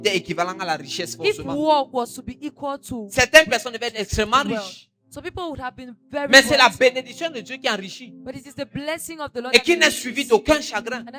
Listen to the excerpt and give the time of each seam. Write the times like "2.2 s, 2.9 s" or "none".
none